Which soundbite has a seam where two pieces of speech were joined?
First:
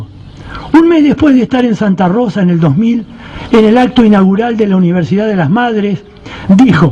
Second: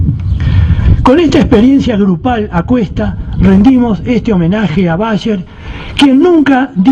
second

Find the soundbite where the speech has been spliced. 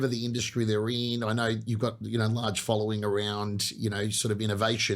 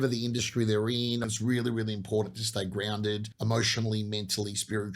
second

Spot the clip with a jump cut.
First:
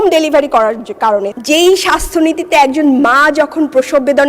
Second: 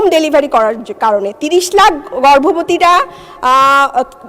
first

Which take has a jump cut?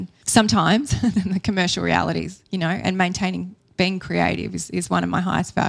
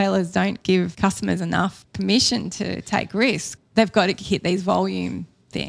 second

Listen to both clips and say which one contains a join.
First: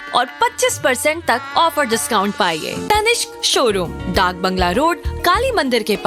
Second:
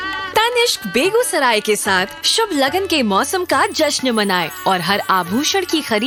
first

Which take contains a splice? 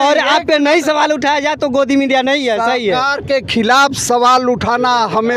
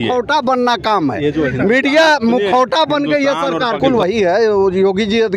second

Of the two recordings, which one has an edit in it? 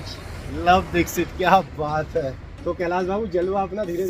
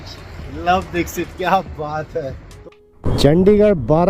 second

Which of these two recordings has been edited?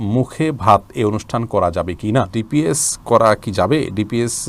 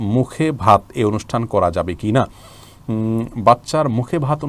first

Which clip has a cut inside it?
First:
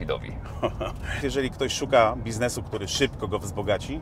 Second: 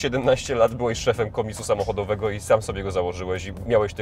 first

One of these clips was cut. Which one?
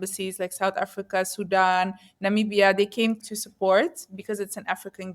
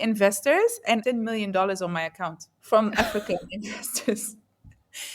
second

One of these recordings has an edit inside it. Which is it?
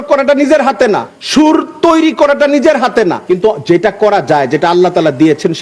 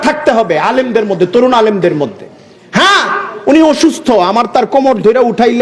first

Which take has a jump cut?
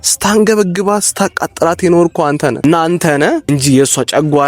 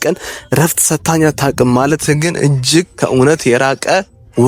first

